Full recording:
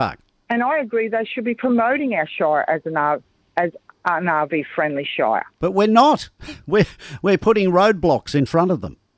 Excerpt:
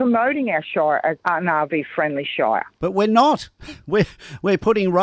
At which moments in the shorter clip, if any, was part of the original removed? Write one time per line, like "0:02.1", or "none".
0:01.2